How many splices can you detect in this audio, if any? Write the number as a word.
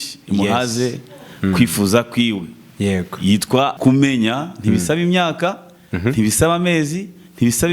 one